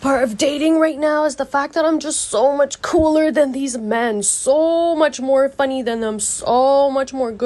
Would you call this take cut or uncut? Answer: uncut